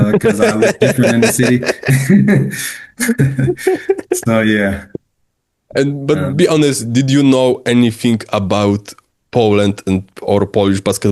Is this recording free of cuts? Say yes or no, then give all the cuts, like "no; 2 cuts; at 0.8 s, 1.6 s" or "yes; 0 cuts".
yes; 0 cuts